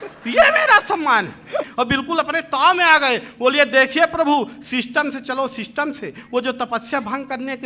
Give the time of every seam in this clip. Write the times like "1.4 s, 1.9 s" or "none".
1.7 s